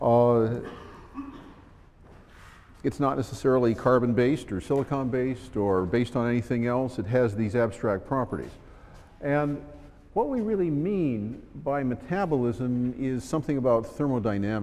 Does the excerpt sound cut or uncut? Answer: cut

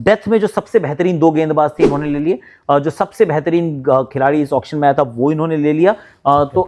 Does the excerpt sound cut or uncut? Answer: uncut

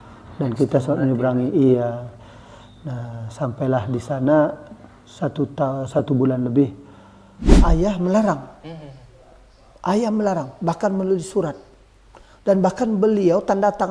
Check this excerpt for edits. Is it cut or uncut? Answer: cut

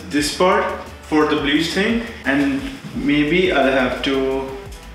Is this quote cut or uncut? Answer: uncut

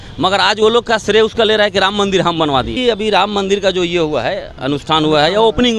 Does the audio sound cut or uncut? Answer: cut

